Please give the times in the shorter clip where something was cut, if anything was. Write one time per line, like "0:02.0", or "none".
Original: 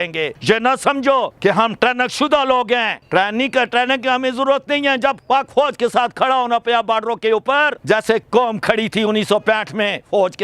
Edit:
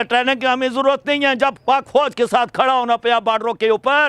none